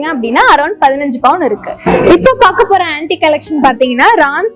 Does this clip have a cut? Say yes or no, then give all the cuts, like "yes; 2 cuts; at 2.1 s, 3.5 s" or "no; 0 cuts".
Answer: no; 0 cuts